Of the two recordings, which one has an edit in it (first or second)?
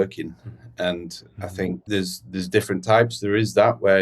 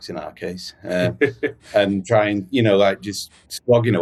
first